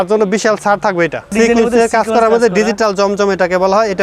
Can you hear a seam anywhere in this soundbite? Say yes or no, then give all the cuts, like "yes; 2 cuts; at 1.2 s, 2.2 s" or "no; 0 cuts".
yes; 1 cut; at 1.3 s